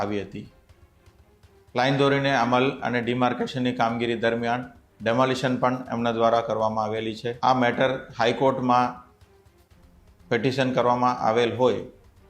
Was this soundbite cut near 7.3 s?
yes; 1 cut; at 7.3 s

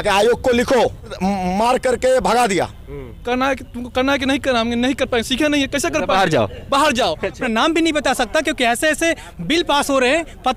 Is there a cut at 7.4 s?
yes; 3 cuts; at 1.2 s, 3.2 s, 7.4 s

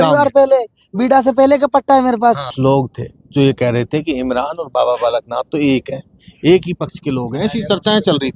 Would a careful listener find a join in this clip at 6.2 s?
no; 1 cut; at 2.5 s

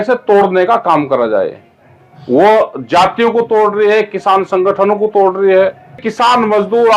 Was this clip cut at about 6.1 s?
yes; 1 cut; at 6.1 s

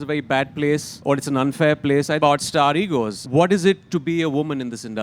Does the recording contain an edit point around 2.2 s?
yes; 3 cuts; at 0.9 s, 2.2 s, 3.2 s

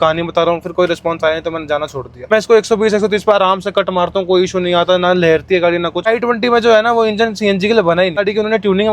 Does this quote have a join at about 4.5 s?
no; 3 cuts; at 2.1 s, 6.1 s, 8.2 s

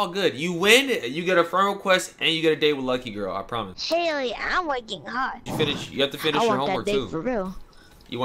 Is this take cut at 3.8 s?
yes; 2 cuts; at 3.8 s, 5.4 s

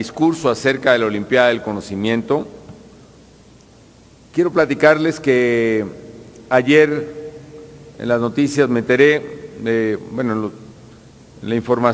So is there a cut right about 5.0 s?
yes; 1 cut; at 5.0 s

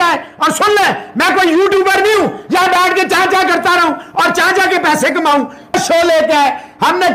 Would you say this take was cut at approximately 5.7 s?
yes; 1 cut; at 5.7 s

